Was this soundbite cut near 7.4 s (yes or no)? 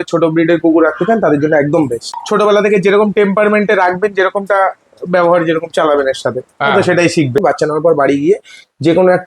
yes